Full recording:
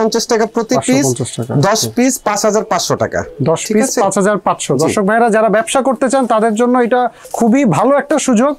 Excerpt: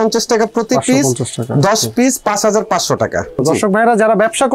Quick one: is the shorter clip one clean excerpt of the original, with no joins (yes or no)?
no